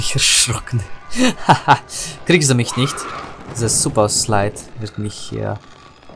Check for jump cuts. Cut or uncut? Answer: uncut